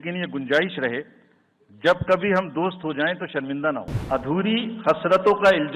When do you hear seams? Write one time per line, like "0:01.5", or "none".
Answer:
0:03.9